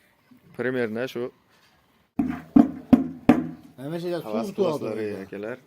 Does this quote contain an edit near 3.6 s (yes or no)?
no